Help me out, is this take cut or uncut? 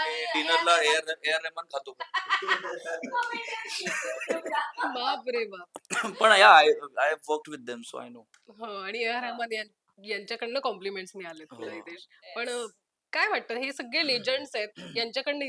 uncut